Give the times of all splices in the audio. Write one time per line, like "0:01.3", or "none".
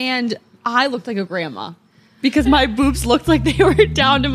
none